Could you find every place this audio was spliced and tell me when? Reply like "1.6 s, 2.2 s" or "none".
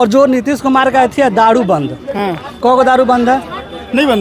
none